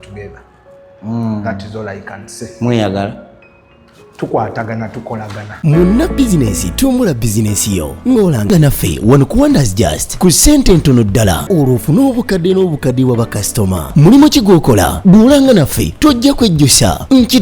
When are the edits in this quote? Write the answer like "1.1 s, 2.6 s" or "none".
5.4 s